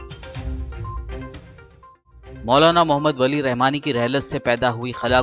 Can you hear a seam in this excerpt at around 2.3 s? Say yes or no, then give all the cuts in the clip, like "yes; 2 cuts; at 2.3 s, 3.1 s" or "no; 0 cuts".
yes; 1 cut; at 2.3 s